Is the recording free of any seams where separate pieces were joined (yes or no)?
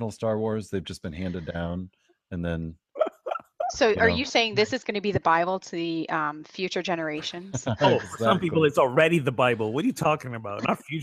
yes